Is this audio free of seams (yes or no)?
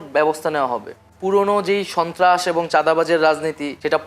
no